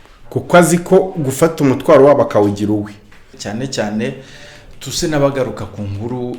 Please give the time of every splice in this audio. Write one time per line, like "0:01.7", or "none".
0:03.4